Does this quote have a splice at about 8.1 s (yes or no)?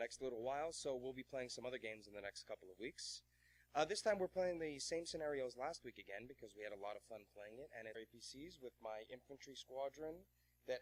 no